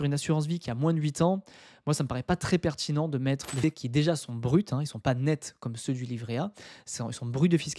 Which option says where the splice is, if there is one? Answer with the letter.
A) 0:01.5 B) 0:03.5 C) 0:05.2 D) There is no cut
B